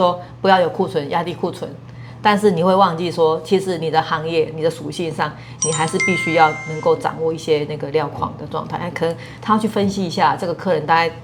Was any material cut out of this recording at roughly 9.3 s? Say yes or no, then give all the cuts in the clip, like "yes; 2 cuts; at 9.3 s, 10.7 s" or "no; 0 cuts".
no; 0 cuts